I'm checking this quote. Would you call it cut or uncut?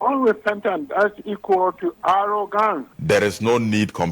cut